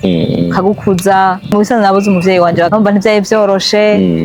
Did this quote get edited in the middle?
yes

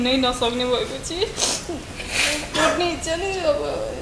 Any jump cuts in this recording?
no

